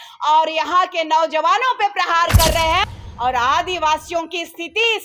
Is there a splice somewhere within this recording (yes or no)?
yes